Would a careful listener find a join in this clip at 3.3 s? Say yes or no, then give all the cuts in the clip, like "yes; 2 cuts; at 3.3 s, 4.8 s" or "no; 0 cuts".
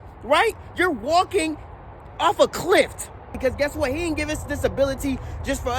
yes; 1 cut; at 3.3 s